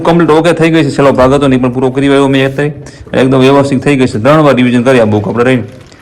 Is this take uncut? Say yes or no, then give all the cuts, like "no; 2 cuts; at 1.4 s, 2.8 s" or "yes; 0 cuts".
yes; 0 cuts